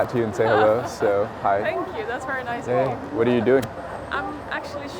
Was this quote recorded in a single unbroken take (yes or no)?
yes